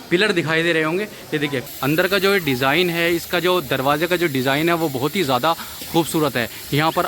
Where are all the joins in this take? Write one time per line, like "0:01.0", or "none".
0:01.6

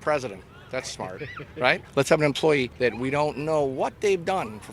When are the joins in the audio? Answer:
none

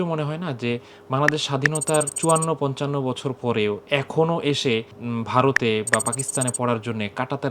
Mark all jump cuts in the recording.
0:02.1
0:05.0

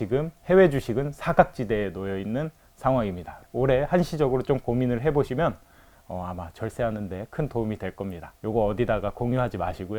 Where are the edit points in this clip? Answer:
0:03.5
0:08.3

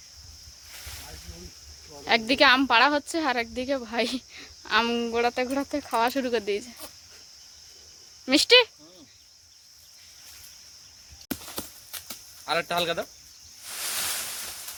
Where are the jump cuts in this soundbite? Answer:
none

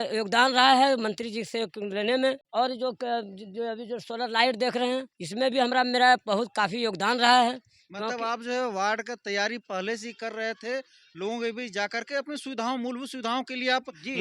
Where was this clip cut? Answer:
0:02.4
0:05.2

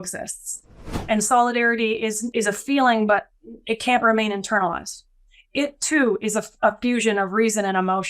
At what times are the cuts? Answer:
0:01.0
0:02.2

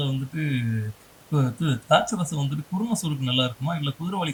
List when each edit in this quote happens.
none

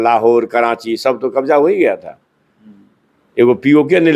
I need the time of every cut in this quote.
none

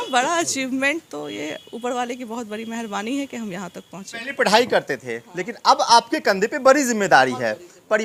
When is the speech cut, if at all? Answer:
none

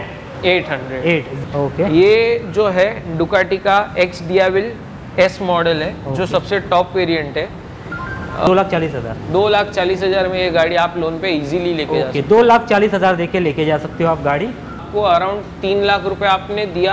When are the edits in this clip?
0:01.4
0:08.5
0:14.8

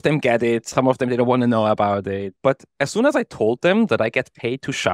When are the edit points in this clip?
0:02.3

